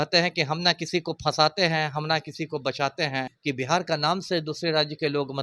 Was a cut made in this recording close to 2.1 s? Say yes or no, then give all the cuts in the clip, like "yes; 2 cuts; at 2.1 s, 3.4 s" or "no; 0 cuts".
no; 1 cut; at 3.3 s